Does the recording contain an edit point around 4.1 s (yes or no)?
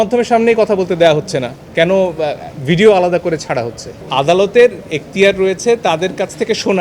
yes